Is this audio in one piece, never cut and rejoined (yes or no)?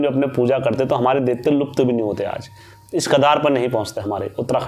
yes